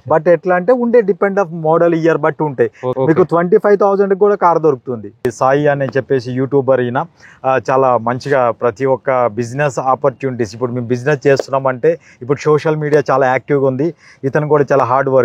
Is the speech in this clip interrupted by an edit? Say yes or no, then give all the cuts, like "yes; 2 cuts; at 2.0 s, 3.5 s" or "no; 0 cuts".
yes; 2 cuts; at 2.8 s, 5.3 s